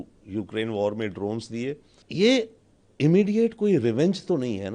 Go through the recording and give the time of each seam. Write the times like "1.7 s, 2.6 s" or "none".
1.9 s